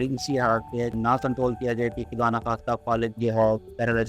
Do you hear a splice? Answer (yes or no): yes